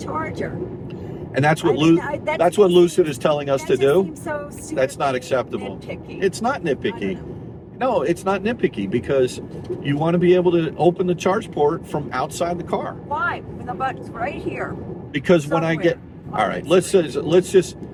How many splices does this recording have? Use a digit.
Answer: 0